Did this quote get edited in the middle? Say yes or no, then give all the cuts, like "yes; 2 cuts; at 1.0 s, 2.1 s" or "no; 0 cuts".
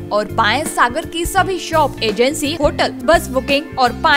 yes; 1 cut; at 2.8 s